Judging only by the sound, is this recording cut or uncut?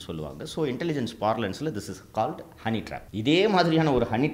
cut